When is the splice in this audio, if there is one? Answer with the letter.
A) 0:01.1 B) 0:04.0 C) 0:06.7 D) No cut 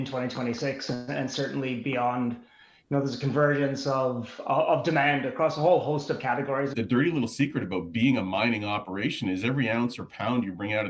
C